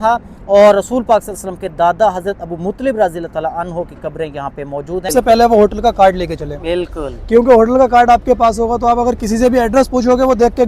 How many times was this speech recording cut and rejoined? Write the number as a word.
one